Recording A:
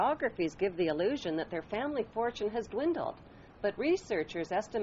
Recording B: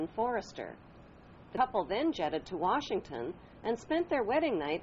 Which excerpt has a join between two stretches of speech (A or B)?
B